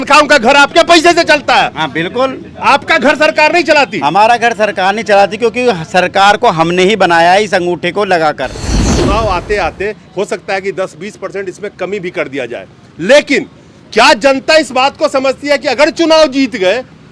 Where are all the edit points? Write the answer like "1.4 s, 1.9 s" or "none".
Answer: 8.8 s